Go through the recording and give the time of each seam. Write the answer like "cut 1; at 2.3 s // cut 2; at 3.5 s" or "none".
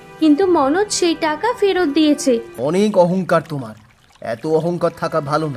cut 1; at 2.5 s